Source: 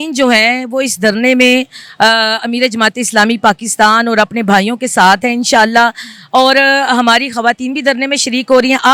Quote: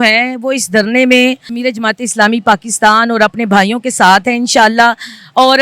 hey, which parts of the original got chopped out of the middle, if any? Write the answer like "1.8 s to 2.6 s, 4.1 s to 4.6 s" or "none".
1.8 s to 2.5 s